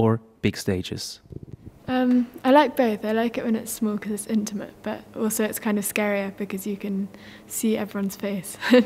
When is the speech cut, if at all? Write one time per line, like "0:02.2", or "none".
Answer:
0:02.4

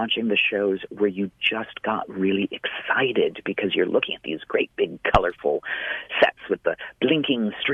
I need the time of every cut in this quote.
none

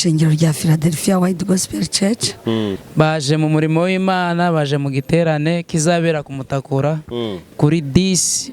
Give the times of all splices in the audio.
0:02.8

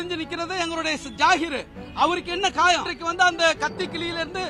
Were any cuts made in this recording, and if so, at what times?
0:02.9

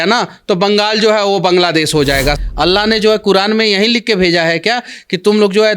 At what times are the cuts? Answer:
0:02.4

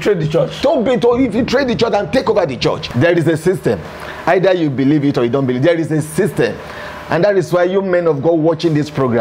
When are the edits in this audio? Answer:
0:02.8

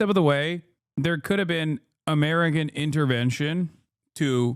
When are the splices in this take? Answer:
none

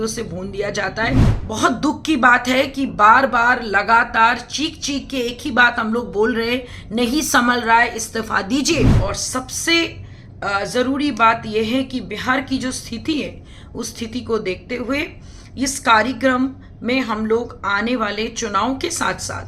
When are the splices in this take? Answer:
0:01.3
0:08.9

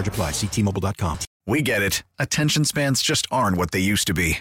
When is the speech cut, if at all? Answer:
0:01.3

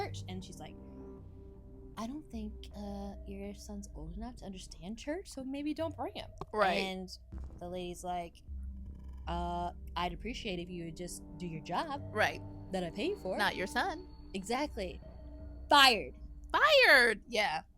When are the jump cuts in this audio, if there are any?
0:13.4

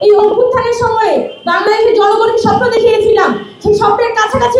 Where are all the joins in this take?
none

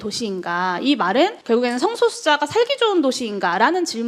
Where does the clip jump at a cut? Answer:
0:01.4

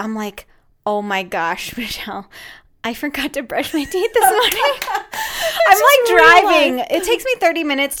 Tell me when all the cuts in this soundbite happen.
none

